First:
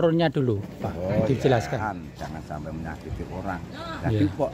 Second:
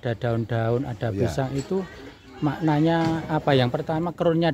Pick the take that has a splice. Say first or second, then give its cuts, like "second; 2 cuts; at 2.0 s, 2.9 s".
first; 1 cut; at 2.0 s